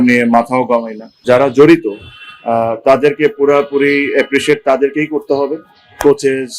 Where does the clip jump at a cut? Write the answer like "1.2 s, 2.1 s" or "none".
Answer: 1.2 s

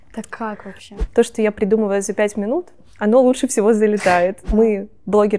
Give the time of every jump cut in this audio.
0.9 s, 4.4 s

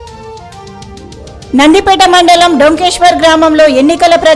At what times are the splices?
none

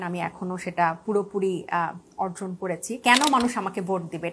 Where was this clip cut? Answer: 3.0 s

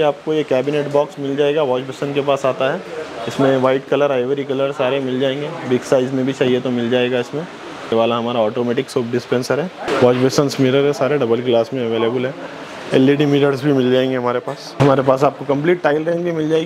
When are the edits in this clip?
7.9 s, 9.9 s

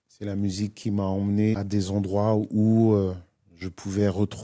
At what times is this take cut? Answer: 1.6 s

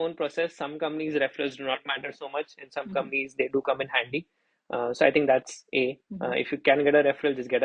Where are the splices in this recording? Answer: none

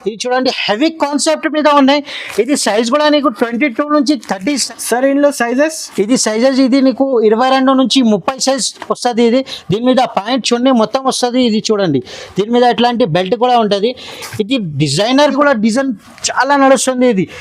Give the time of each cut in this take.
4.7 s, 15.4 s

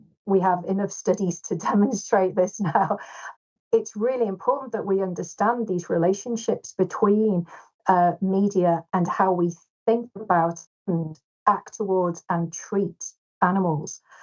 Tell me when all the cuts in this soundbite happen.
10.7 s

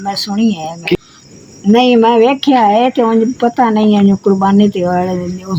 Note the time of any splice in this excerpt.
0.9 s

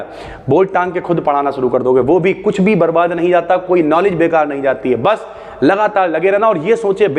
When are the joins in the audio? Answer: none

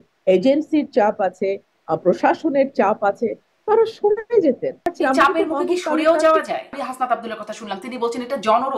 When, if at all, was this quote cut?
4.9 s, 6.7 s

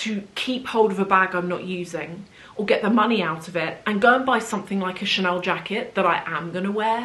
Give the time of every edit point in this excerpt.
none

